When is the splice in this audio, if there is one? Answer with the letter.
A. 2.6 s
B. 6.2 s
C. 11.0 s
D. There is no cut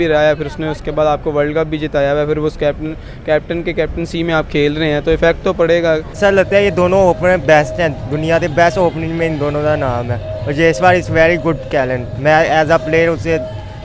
B